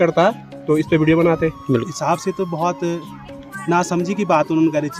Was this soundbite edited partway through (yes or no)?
yes